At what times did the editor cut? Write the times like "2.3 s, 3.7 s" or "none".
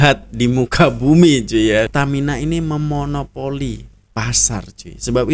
1.9 s